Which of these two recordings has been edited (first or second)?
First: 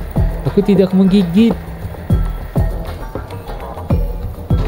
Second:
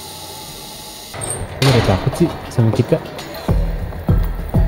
second